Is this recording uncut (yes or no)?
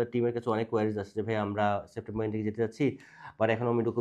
yes